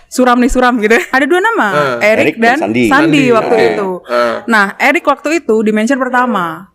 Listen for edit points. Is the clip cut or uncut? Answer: cut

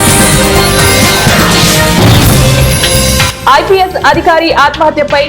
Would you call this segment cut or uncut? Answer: uncut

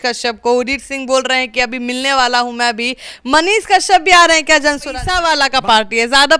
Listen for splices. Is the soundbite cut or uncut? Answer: cut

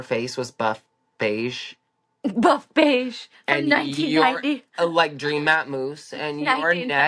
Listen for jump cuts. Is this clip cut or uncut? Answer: uncut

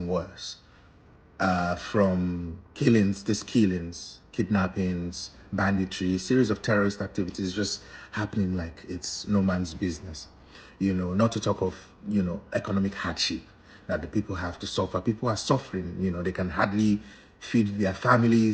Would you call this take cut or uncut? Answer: uncut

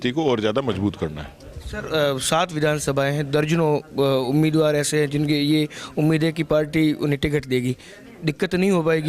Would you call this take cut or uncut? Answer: uncut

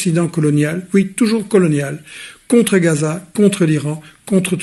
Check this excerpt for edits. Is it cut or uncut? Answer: uncut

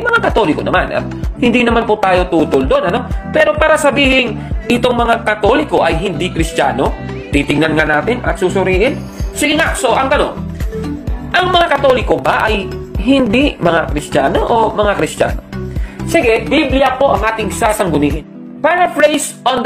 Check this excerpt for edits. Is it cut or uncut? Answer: cut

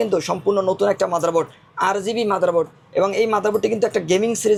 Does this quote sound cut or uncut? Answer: uncut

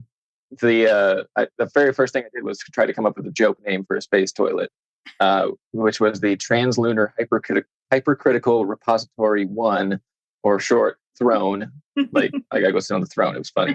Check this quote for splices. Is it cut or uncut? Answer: uncut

